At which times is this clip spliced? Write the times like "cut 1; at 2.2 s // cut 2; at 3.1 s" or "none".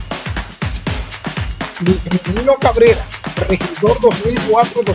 cut 1; at 1.8 s